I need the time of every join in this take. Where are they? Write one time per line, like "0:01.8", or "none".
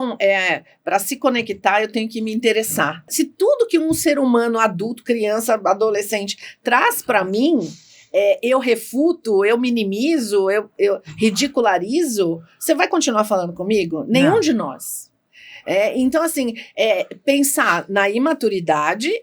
0:03.1